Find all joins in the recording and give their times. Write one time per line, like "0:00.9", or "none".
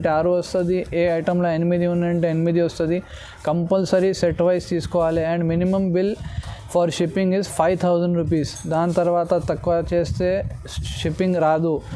none